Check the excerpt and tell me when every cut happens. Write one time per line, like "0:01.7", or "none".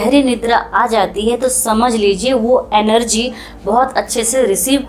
none